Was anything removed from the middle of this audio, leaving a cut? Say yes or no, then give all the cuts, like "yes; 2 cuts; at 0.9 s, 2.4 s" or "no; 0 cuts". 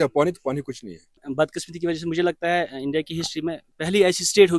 yes; 1 cut; at 1.1 s